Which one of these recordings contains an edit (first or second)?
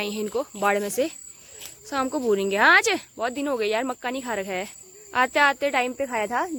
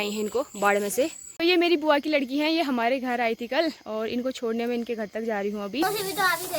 second